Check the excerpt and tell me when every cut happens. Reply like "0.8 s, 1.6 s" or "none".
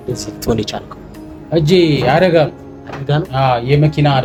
none